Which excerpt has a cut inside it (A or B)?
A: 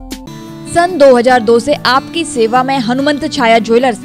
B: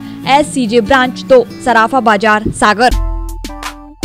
B